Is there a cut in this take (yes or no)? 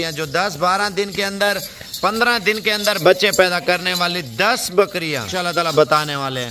yes